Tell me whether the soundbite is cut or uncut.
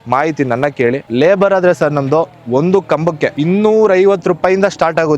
cut